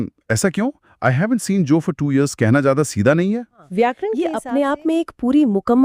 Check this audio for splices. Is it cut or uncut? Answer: cut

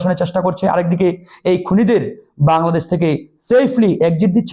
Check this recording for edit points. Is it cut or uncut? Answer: uncut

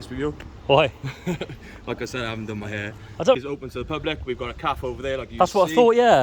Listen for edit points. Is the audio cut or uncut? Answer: cut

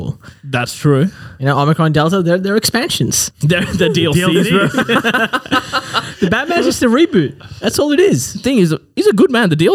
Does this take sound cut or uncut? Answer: uncut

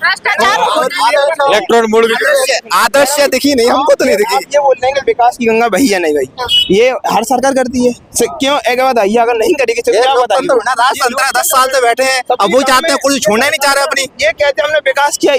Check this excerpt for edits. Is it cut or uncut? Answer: uncut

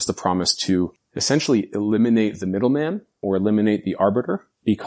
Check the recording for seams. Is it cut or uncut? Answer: cut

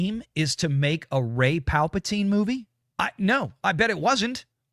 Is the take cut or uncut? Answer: uncut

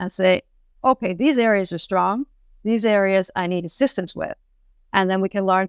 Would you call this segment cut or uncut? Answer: uncut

